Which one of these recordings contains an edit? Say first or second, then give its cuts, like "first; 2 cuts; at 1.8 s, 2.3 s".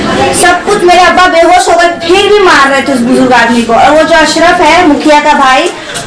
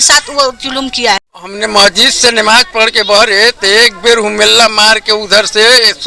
second; 1 cut; at 1.6 s